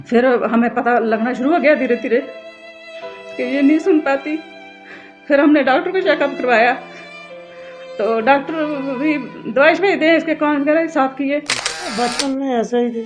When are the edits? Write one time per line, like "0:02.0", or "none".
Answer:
0:11.8